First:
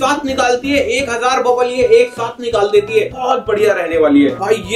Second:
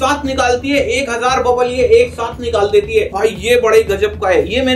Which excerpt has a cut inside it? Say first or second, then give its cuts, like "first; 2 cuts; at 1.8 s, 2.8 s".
second; 1 cut; at 3.1 s